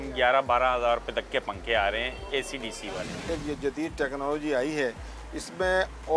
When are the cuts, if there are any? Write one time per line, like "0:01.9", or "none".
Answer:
0:03.2